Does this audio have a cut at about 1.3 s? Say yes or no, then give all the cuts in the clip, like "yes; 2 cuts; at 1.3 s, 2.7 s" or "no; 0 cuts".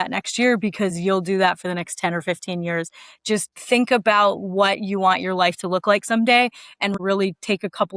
no; 1 cut; at 6.9 s